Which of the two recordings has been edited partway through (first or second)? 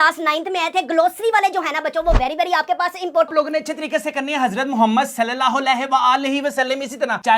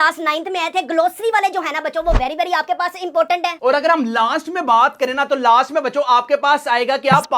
first